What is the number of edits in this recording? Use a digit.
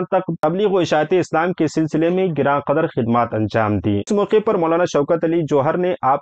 1